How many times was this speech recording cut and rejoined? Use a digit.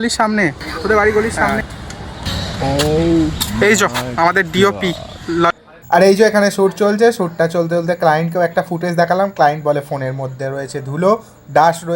2